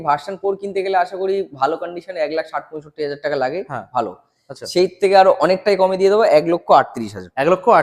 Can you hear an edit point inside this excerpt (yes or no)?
no